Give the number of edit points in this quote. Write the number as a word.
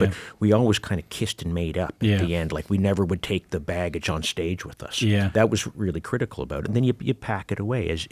one